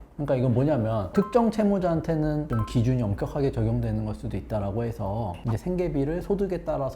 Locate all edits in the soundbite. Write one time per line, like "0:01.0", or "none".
0:01.1
0:02.5